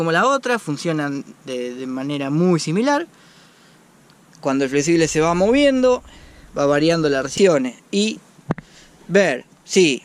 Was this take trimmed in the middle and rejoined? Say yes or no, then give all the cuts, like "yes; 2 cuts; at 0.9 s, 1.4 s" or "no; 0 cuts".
yes; 1 cut; at 7.3 s